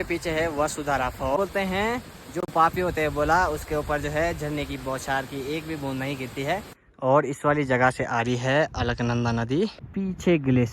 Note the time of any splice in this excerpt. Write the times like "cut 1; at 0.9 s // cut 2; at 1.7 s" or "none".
cut 1; at 1.4 s // cut 2; at 6.8 s // cut 3; at 9.8 s